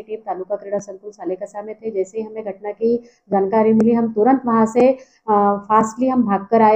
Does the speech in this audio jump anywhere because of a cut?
no; 0 cuts

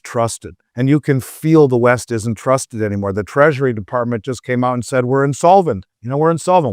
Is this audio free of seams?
yes; 0 cuts

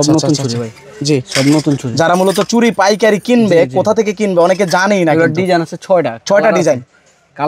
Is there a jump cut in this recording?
no; 0 cuts

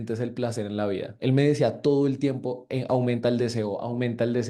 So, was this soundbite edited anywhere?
no; 0 cuts

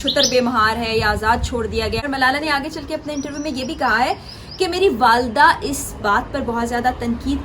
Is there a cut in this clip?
yes; 1 cut; at 2.0 s

